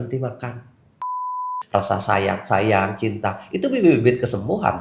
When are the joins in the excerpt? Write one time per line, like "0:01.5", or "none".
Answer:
0:01.3